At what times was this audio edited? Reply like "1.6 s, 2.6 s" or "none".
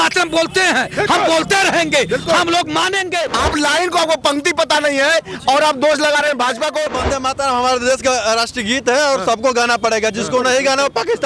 3.3 s, 6.9 s

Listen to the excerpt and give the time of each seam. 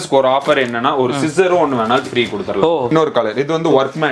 2.9 s

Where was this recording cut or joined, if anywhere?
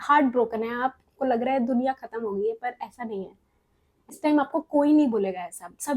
4.1 s

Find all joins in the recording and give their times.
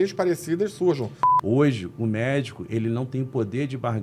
1.2 s

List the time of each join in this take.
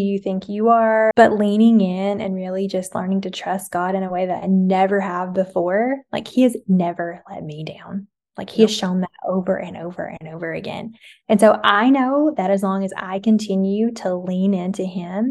1.1 s

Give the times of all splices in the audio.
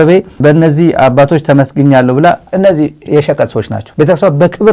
2.5 s, 3.8 s

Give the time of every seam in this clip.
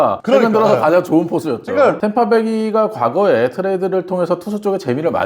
2.0 s

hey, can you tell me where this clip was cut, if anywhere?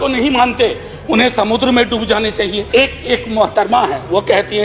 2.6 s

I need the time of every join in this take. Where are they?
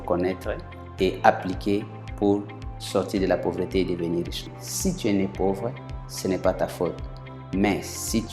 4.4 s

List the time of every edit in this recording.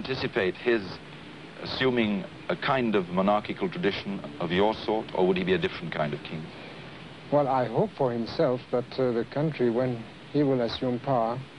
5.1 s

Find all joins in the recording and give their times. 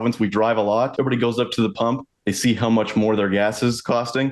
0.9 s

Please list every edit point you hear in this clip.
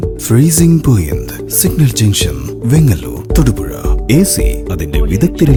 none

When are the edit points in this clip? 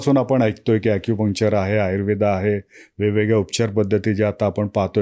none

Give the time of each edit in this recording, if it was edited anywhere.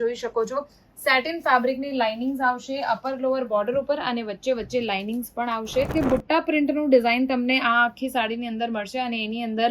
5.9 s

